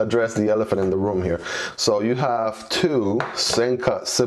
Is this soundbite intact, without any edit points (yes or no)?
yes